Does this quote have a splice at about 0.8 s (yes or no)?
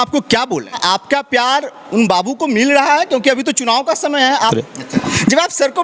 yes